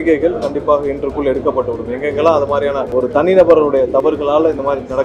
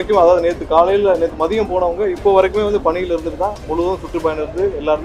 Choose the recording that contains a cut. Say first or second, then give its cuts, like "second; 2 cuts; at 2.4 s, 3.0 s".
first; 1 cut; at 2.9 s